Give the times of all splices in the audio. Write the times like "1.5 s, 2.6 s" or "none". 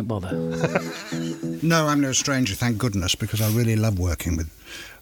1.5 s